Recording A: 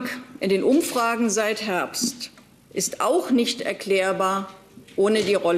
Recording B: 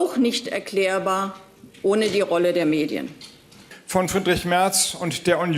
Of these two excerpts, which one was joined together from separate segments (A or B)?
B